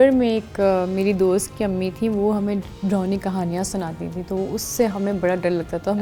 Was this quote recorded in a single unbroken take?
yes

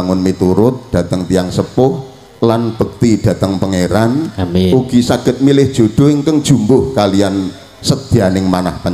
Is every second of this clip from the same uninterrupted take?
yes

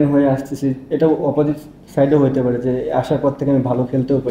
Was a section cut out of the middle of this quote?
no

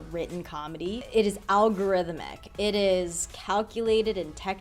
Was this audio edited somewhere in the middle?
yes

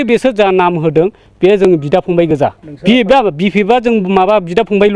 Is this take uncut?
no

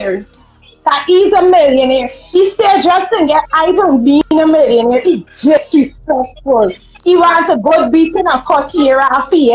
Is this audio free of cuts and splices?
yes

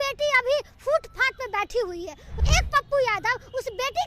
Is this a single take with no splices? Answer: no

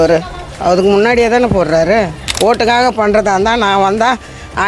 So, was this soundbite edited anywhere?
yes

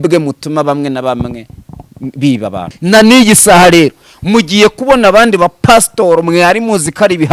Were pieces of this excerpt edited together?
yes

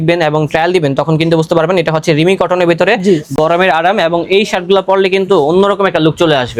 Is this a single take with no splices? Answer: yes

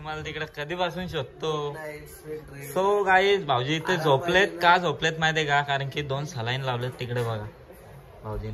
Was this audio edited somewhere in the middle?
no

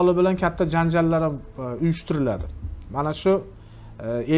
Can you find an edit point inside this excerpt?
no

